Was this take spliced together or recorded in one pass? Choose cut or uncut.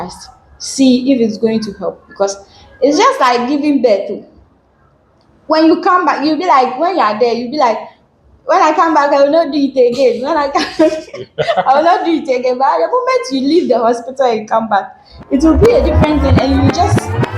uncut